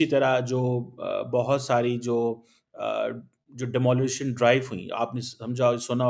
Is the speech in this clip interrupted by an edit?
no; 0 cuts

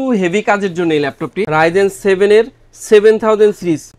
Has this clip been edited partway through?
yes; 1 cut; at 1.3 s

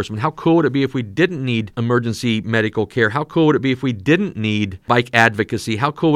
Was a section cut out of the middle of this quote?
yes; 2 cuts; at 1.7 s, 4.8 s

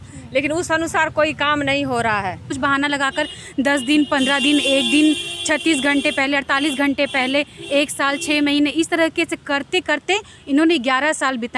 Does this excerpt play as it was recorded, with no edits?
no; 2 cuts; at 2.5 s, 7.6 s

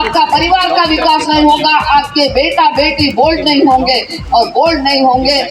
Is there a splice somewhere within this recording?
no; 0 cuts

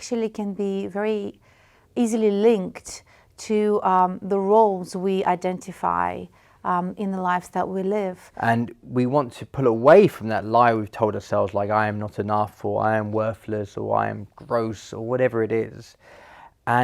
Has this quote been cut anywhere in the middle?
yes; 1 cut; at 8.2 s

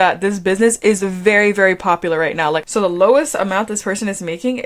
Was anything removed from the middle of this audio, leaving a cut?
yes; 1 cut; at 2.6 s

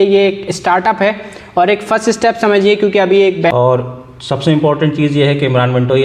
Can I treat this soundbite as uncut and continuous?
no; 1 cut; at 3.5 s

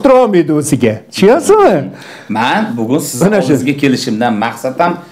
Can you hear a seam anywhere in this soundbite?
no; 0 cuts

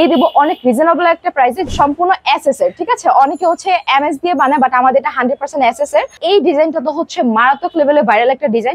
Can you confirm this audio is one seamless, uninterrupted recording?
no; 2 cuts; at 1.6 s, 6.2 s

